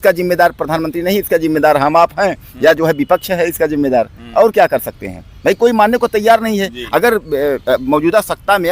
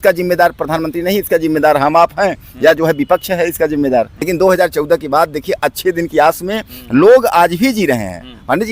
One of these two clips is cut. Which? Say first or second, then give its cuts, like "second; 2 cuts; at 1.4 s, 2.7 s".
second; 1 cut; at 4.2 s